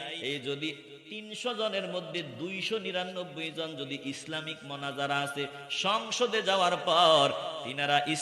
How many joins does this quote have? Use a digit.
0